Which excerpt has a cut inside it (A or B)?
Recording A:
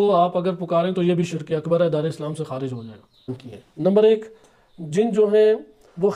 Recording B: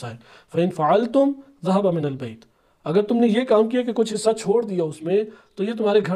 A